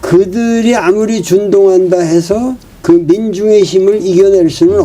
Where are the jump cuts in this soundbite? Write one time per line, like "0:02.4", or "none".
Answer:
0:02.7

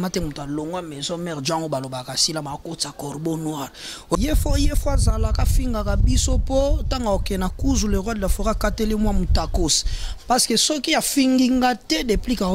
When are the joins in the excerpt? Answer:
0:04.2

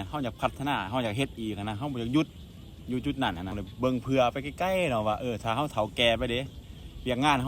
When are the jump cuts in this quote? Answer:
0:03.6

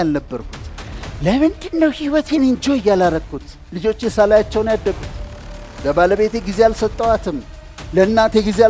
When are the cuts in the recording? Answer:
0:03.7

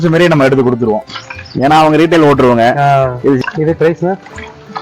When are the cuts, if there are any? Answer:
0:03.4

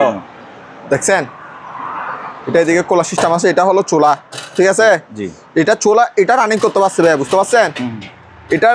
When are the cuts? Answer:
none

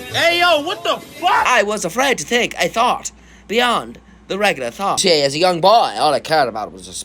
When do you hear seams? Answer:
0:01.5
0:05.0

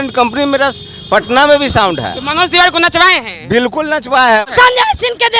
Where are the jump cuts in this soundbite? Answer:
0:04.5

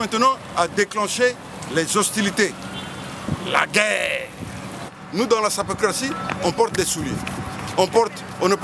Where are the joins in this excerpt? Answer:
0:05.0

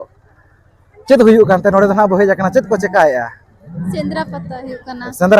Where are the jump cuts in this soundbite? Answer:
0:03.9

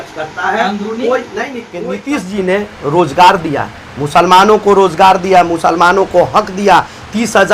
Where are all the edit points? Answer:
0:01.8

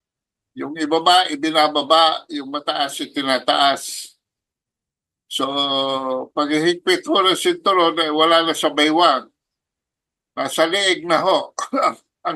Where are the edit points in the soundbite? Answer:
none

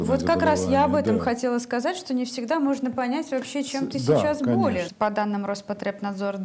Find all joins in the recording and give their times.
0:04.9

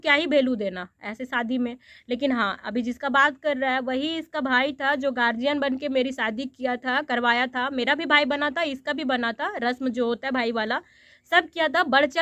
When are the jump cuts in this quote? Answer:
none

